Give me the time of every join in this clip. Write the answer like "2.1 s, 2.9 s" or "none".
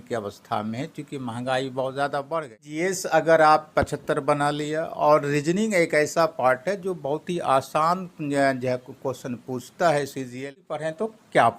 2.7 s, 10.4 s